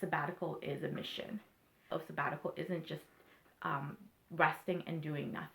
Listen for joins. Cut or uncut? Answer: cut